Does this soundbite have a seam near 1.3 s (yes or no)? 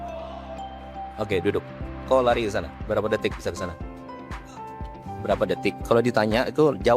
no